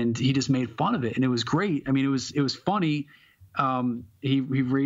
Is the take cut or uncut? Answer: uncut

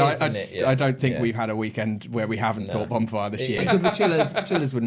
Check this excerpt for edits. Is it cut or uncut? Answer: cut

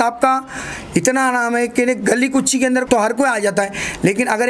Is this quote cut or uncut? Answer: cut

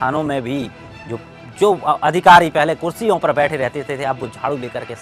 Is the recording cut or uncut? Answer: uncut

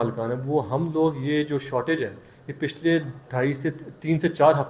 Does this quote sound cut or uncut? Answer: uncut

